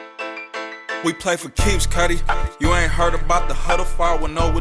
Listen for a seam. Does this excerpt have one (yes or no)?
yes